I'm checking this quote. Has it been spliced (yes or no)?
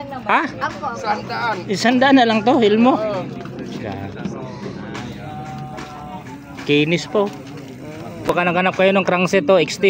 yes